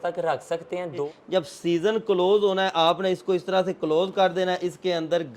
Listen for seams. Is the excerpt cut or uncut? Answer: cut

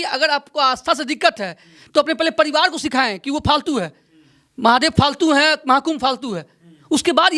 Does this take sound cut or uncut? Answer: uncut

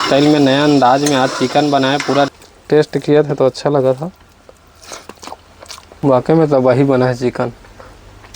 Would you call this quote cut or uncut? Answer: cut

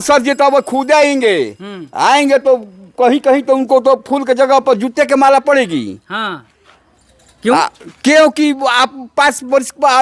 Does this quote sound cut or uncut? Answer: uncut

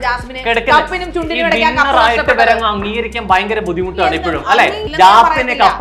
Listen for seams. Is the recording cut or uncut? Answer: cut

